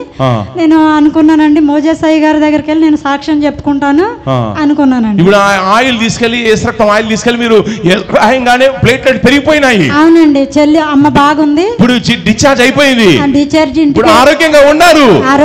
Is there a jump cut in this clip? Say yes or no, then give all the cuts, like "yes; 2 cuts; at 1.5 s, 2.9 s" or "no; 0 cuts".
no; 0 cuts